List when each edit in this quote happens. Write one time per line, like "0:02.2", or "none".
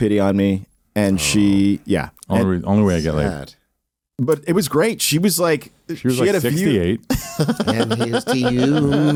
none